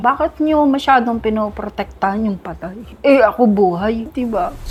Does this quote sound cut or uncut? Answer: uncut